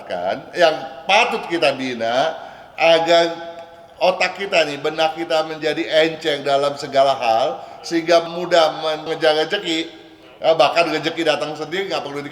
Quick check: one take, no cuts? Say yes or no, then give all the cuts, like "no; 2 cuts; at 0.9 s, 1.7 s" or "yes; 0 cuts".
yes; 0 cuts